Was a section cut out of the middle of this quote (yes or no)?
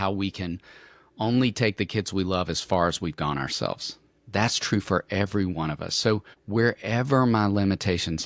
yes